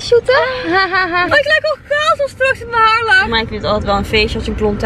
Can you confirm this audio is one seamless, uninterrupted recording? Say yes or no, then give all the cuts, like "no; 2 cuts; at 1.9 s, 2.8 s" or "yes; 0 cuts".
no; 2 cuts; at 1.3 s, 3.3 s